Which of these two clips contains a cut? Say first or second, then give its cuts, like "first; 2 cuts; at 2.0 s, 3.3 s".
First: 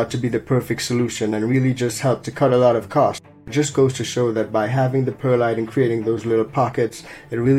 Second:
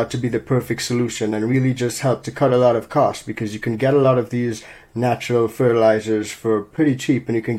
first; 1 cut; at 3.5 s